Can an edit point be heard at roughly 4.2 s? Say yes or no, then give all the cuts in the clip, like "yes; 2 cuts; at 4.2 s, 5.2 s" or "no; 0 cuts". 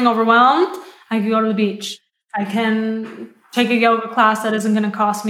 no; 1 cut; at 1.9 s